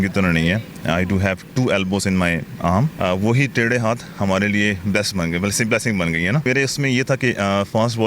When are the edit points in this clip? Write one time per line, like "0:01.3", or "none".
0:02.9
0:06.5